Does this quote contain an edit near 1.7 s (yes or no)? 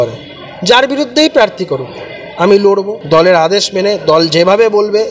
no